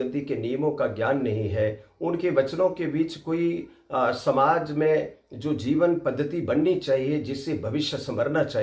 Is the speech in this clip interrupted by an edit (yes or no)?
no